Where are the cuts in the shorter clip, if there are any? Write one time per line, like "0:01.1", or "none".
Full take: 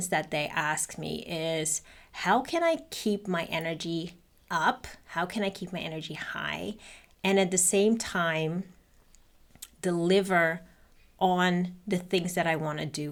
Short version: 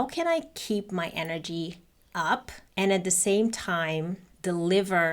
0:02.6
0:04.2